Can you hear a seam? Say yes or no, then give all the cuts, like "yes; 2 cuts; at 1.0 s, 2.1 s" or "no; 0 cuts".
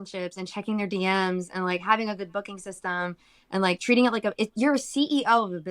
no; 0 cuts